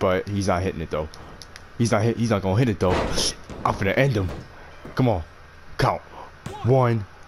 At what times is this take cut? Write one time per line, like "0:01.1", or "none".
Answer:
none